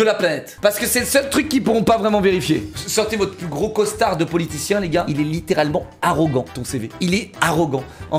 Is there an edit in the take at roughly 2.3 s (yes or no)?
no